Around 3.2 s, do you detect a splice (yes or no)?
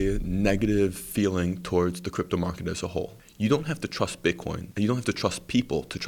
yes